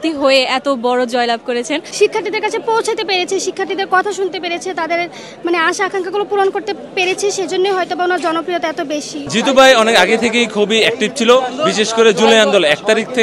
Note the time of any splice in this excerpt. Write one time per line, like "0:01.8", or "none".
0:01.9
0:09.2